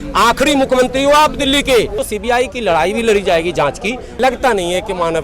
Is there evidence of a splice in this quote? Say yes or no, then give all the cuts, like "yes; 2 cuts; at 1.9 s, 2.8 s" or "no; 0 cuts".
yes; 2 cuts; at 2.0 s, 4.0 s